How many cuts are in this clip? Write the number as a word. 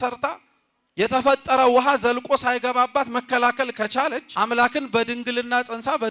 one